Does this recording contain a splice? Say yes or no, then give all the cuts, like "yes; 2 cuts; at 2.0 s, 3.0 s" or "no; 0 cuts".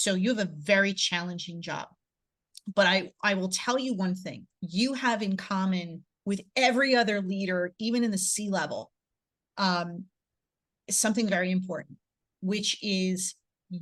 no; 0 cuts